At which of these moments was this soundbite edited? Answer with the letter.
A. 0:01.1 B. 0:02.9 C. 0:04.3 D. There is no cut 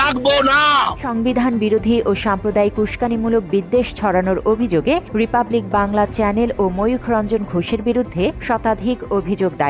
A